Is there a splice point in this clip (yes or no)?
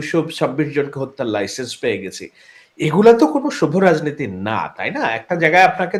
no